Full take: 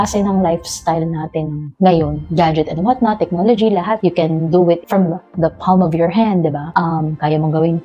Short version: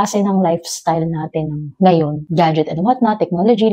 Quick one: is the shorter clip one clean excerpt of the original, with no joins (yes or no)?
yes